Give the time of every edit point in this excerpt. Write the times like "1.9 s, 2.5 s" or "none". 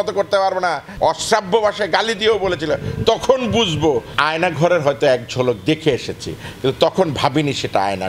0.9 s, 4.1 s